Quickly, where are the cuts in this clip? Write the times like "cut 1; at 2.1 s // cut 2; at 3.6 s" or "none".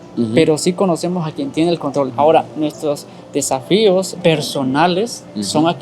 cut 1; at 2.1 s // cut 2; at 4.1 s